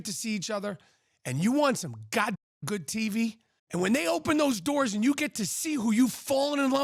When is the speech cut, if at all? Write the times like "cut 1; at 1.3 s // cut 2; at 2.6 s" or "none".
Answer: cut 1; at 3.5 s